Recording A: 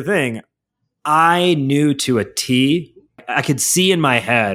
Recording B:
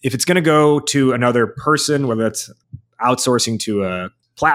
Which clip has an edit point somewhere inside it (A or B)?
A